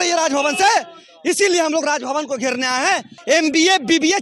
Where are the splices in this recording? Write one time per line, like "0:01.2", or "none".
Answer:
0:03.1